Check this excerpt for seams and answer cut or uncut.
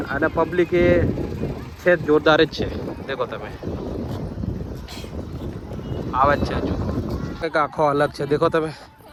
uncut